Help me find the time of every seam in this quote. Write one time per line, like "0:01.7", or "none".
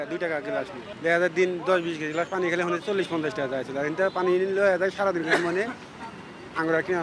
none